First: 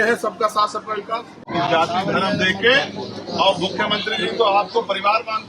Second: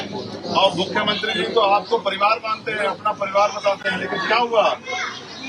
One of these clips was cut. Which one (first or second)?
first